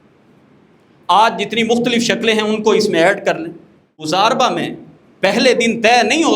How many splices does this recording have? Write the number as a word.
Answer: one